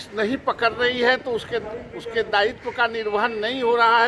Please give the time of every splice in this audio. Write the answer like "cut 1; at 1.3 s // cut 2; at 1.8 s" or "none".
none